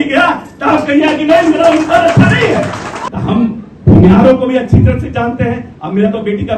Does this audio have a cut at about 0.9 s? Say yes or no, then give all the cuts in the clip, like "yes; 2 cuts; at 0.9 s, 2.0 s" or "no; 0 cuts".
no; 1 cut; at 3.0 s